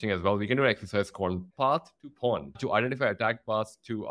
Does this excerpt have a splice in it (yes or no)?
yes